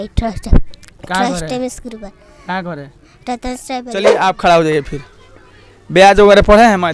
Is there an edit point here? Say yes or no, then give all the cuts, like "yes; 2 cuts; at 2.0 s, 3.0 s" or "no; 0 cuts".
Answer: yes; 1 cut; at 4.2 s